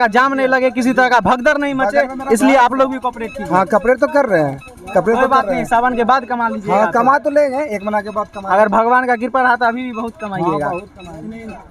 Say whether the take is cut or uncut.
uncut